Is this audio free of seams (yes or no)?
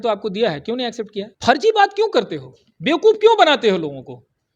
no